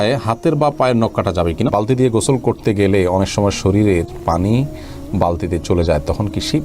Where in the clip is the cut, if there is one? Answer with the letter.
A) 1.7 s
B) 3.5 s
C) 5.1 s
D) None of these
A